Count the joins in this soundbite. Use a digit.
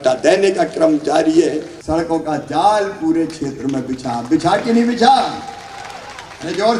1